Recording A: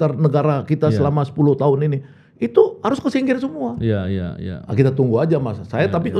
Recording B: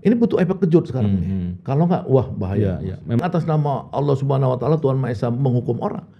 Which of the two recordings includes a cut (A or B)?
B